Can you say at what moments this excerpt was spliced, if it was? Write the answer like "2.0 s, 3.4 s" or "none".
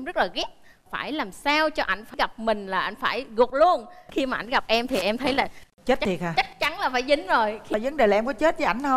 none